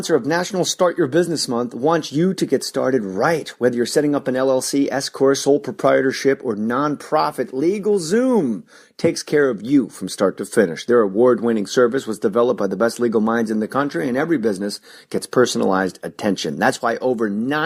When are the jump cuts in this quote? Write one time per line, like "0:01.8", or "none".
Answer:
none